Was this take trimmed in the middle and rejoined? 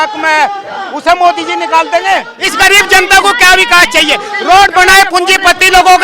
yes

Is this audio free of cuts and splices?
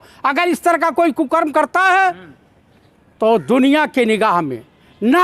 yes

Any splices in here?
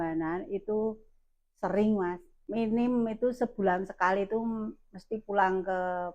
yes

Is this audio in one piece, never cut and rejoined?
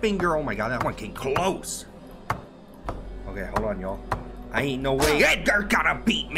yes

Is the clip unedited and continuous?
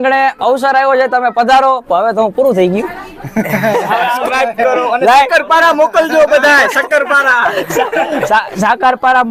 no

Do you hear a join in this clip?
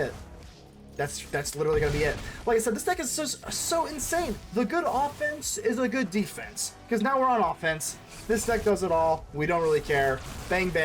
yes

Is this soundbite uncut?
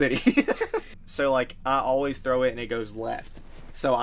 no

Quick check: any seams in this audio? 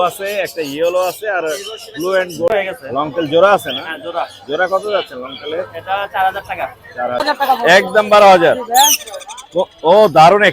yes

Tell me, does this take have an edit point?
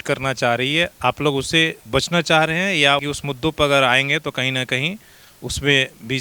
yes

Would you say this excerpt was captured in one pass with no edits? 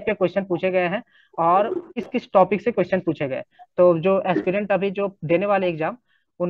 no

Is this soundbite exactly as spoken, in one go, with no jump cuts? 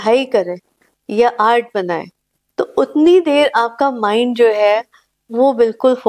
yes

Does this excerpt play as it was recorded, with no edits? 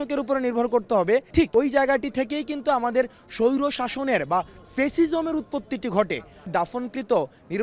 no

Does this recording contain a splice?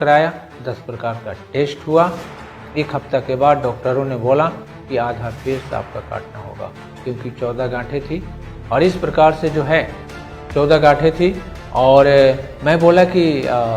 no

